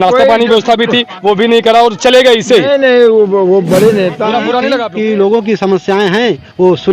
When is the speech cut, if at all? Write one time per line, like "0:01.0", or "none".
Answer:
0:04.8